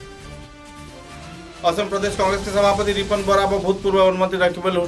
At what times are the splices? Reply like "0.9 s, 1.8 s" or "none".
1.5 s